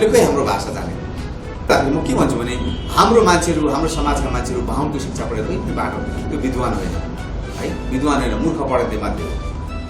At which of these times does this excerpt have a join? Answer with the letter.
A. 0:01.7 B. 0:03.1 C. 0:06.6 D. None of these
A